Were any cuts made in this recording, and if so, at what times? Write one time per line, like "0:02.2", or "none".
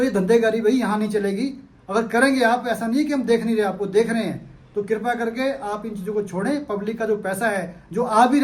none